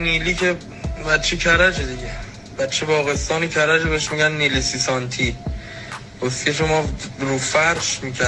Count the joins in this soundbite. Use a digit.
0